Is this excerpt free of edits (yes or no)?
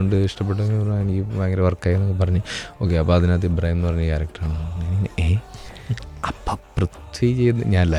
yes